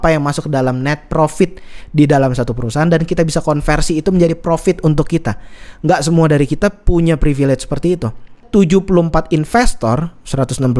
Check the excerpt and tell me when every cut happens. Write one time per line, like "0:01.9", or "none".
0:08.4

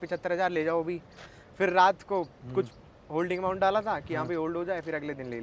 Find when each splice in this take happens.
none

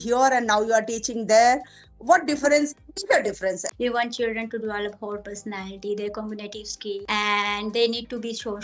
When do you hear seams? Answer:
0:03.7
0:07.0

